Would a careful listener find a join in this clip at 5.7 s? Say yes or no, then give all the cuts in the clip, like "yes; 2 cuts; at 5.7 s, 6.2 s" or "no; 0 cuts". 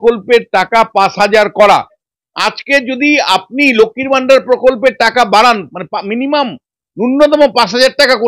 no; 1 cut; at 2.1 s